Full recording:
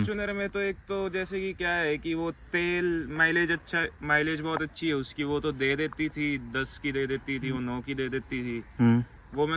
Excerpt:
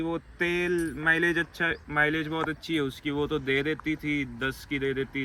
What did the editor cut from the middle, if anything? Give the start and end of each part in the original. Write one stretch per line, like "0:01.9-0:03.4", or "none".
none

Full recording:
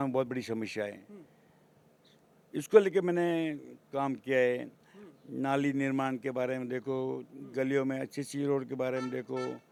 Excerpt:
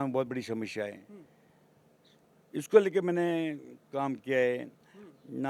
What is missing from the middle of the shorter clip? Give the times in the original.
none

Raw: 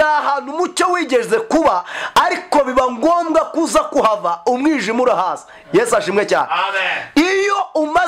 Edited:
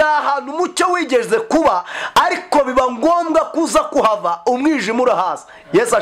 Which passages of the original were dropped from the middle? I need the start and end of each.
none

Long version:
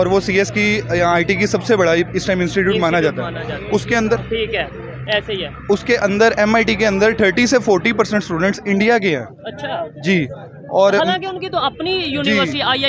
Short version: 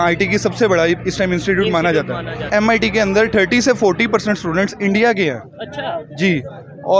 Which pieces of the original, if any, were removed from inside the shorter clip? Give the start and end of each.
0:03.6-0:06.4

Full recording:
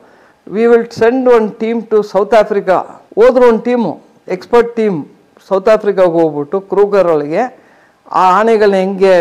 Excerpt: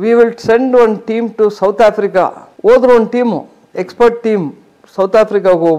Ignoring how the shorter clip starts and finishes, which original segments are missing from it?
none

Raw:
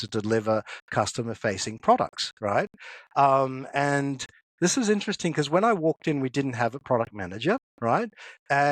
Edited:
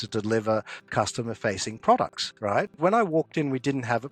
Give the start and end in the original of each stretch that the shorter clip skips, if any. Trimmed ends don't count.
0:02.8-0:05.5

